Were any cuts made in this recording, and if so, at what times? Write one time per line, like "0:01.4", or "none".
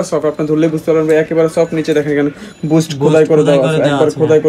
none